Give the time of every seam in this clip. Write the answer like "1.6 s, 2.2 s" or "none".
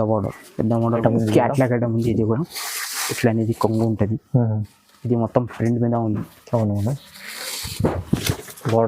1.0 s